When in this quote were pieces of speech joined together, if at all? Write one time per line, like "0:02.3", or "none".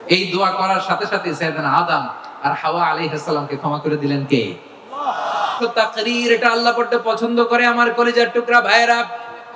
0:05.5